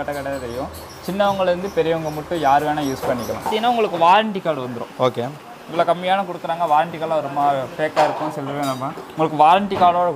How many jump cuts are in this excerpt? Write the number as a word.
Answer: one